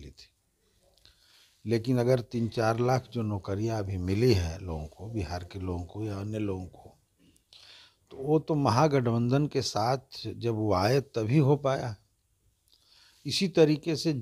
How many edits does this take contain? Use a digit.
0